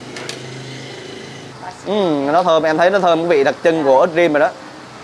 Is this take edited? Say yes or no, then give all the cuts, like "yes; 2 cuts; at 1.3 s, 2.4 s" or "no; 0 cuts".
yes; 1 cut; at 1.5 s